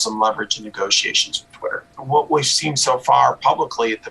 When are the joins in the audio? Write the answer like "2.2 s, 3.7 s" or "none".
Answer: 1.8 s